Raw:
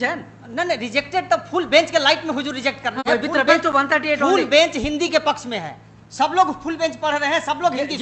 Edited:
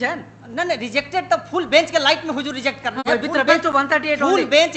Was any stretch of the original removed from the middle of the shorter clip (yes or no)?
no